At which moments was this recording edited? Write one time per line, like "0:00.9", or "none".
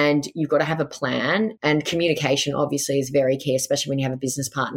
0:01.5